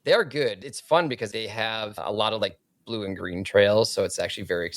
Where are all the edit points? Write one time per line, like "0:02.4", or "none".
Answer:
0:01.4